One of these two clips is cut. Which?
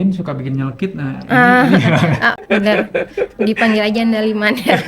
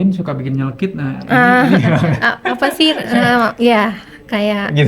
first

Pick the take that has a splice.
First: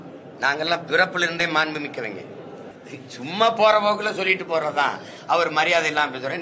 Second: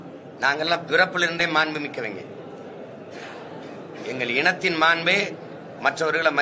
first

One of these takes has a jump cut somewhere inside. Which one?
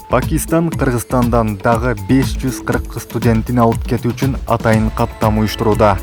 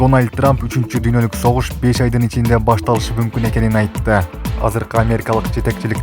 second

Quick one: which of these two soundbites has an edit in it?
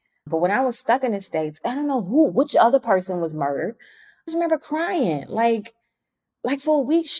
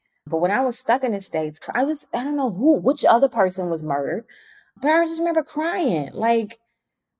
first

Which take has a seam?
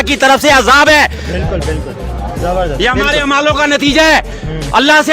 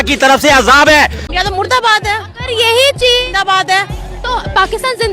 second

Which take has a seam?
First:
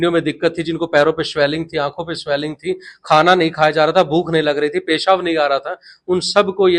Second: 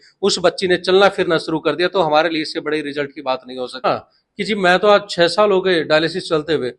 second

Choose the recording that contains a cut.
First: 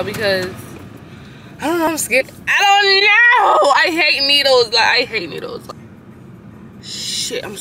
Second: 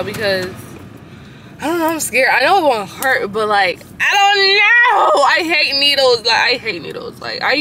first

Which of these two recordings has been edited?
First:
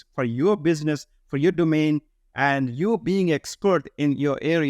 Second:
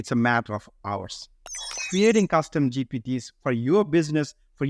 second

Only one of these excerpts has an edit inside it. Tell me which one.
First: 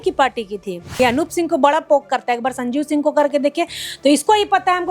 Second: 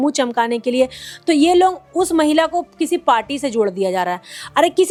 first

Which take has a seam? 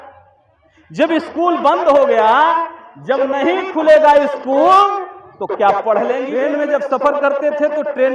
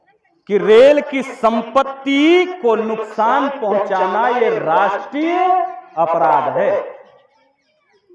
first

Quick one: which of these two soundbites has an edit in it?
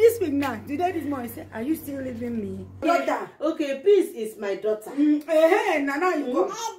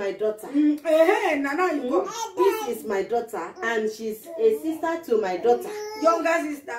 first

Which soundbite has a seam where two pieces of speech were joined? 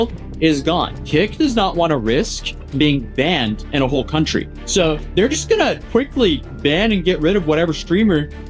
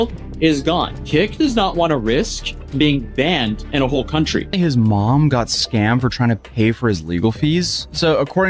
second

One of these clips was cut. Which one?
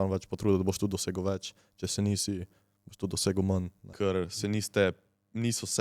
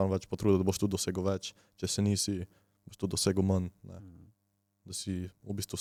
first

